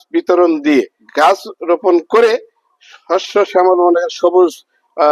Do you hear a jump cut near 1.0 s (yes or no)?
yes